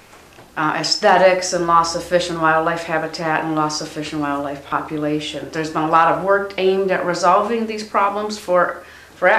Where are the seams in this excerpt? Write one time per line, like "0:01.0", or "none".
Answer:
0:05.1